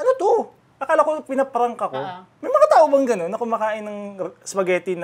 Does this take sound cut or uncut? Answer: cut